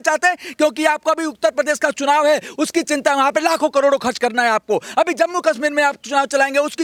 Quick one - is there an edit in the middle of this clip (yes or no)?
no